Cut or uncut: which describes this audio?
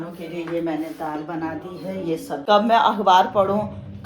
cut